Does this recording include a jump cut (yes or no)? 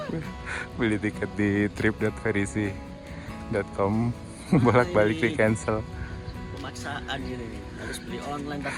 no